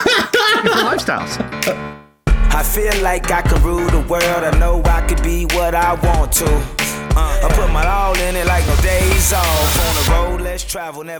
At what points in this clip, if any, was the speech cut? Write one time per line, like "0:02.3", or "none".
0:01.9